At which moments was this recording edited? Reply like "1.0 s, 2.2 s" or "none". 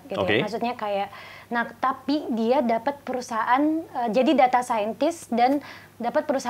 none